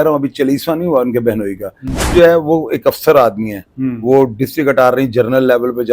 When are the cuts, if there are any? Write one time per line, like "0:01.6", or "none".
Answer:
0:02.1